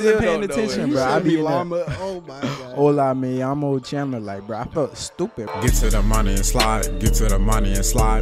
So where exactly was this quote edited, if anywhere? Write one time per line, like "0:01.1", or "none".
0:05.5

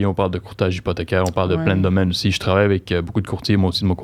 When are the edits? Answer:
none

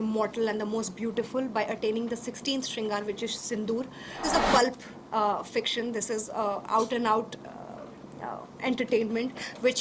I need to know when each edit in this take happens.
0:04.2

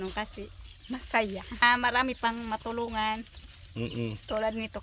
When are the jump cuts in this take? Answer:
0:01.6

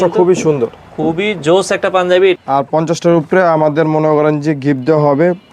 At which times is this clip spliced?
0:02.4

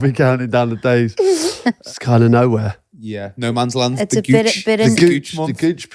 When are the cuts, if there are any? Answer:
0:01.8

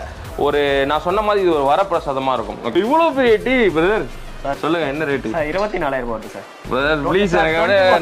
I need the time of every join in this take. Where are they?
0:02.8

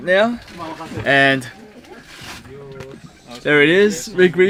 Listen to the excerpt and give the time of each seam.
none

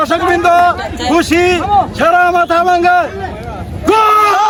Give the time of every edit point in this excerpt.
none

